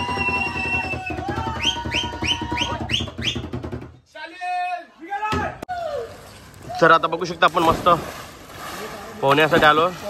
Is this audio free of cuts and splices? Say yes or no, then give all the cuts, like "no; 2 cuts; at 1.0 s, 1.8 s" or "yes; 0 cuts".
no; 1 cut; at 5.6 s